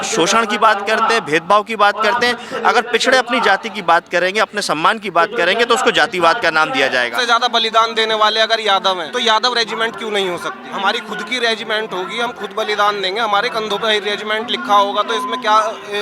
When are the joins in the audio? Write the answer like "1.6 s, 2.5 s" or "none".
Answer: 7.2 s, 9.1 s, 10.6 s